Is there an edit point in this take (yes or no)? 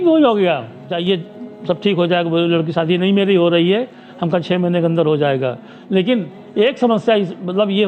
yes